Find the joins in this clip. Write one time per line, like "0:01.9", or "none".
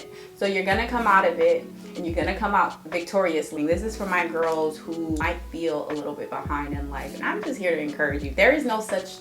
0:03.5
0:05.2